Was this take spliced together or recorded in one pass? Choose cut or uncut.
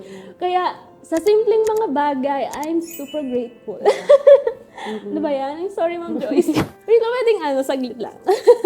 cut